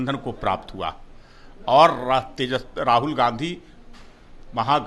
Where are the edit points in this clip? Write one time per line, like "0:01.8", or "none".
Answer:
none